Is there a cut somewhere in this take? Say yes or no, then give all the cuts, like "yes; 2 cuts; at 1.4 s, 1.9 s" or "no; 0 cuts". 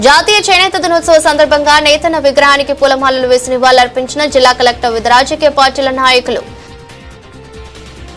yes; 1 cut; at 6.4 s